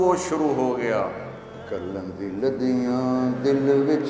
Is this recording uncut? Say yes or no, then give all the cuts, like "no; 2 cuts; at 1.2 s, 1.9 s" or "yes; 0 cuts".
no; 1 cut; at 1.5 s